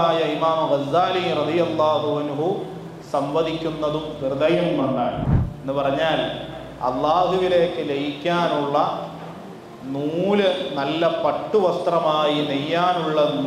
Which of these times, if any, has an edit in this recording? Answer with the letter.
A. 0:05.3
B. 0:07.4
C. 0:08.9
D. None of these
A